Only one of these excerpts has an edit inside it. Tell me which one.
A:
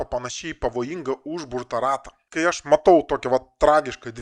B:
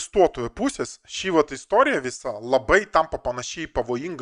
A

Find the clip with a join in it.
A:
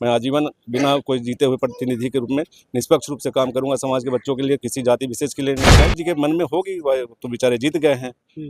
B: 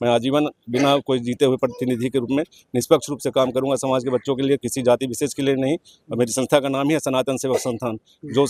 A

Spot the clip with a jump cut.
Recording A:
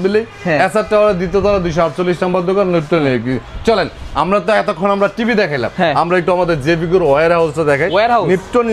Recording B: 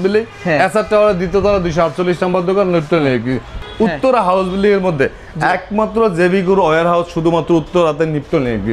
B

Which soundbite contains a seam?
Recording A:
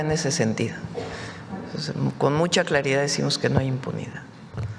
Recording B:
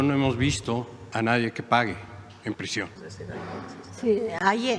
B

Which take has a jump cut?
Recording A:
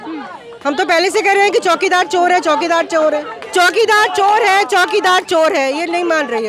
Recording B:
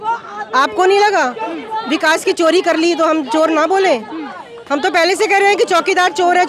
A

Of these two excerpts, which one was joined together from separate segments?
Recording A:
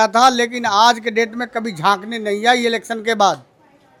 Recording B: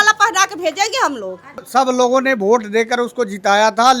B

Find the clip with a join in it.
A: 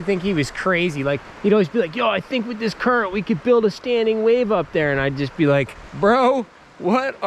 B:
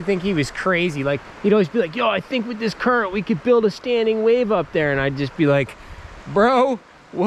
A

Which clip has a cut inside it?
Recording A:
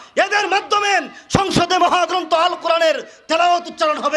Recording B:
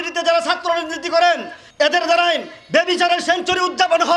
B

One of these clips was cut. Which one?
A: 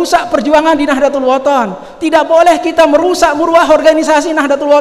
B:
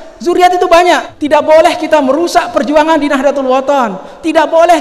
B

